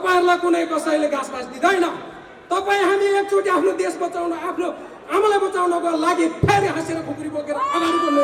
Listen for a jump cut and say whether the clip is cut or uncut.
uncut